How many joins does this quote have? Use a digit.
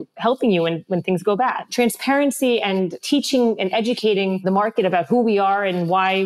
3